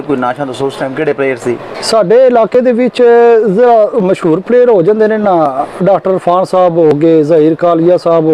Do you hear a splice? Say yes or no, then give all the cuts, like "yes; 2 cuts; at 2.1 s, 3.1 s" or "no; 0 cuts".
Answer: no; 0 cuts